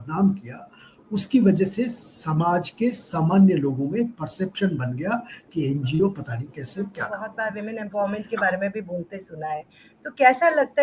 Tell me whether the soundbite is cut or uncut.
cut